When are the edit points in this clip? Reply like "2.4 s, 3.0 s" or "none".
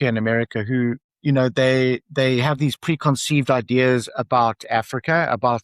1.1 s